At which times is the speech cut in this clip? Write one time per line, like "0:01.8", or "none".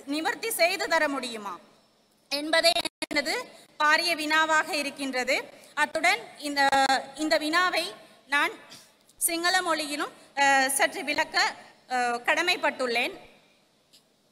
none